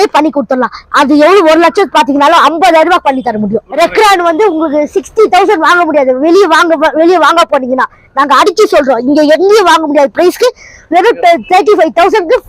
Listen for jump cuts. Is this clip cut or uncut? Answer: cut